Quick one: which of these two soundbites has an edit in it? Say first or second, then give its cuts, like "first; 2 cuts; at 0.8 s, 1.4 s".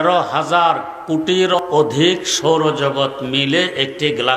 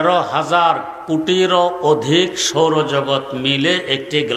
first; 1 cut; at 1.5 s